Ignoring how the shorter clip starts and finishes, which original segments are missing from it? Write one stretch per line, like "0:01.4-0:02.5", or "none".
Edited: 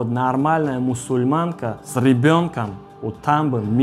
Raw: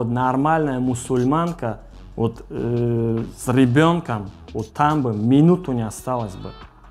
0:01.8-0:03.4